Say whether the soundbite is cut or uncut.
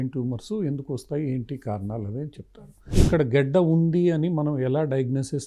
cut